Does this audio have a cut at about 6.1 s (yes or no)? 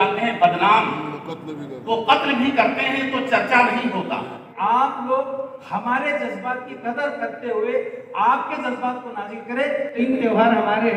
no